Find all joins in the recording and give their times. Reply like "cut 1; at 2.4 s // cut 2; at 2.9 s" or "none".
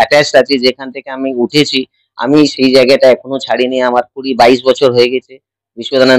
none